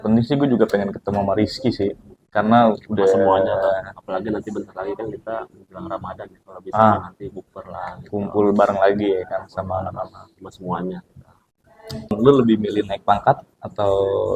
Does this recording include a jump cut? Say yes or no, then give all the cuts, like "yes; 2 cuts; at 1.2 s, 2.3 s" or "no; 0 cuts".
yes; 1 cut; at 12.1 s